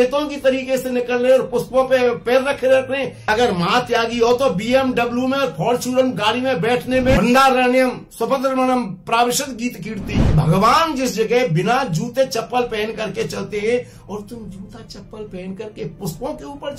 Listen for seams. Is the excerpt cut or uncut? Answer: cut